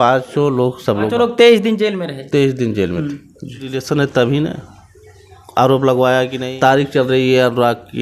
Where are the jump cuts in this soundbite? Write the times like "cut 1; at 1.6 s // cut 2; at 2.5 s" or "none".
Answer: cut 1; at 1.1 s // cut 2; at 3.8 s // cut 3; at 6.9 s